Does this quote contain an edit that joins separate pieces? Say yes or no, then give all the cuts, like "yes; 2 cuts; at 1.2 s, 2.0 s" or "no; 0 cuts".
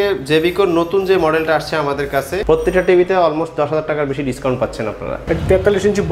yes; 2 cuts; at 2.3 s, 5.1 s